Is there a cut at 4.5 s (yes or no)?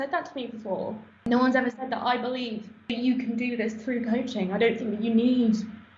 no